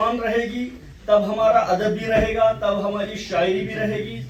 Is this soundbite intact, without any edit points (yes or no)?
yes